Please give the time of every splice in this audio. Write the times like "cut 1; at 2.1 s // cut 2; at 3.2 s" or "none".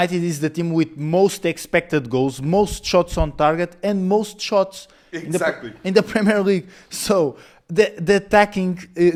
none